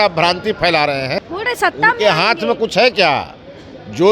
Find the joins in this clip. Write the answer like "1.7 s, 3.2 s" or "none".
1.2 s